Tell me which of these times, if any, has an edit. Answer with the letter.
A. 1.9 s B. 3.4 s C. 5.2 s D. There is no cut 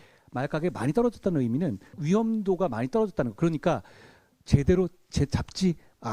A